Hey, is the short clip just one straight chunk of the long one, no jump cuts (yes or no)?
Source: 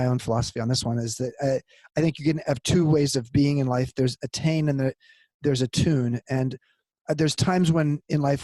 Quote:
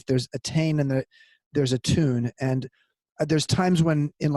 yes